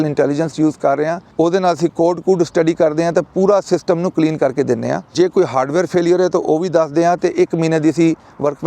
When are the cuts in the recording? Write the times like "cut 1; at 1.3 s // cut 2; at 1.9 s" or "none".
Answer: cut 1; at 1.2 s // cut 2; at 5.1 s